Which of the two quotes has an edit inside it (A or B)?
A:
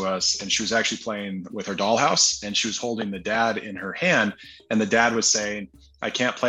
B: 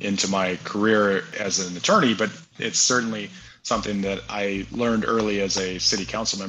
B